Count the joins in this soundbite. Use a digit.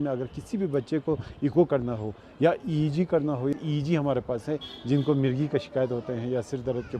1